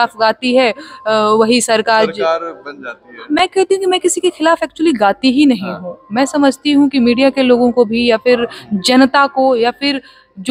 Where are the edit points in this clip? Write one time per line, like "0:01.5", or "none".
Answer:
none